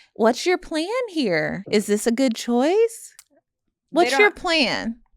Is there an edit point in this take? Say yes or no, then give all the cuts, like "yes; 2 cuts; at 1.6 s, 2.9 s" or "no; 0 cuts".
yes; 1 cut; at 1.6 s